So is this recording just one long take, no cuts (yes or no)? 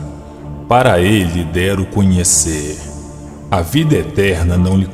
yes